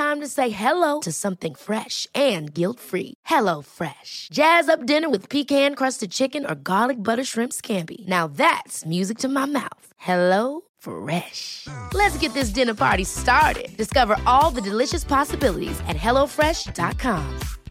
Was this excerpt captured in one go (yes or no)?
yes